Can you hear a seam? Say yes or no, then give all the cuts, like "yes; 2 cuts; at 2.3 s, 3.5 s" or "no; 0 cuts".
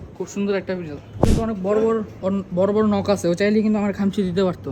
yes; 1 cut; at 1.3 s